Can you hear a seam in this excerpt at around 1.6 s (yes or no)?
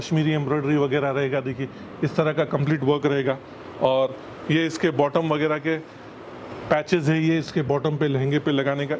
no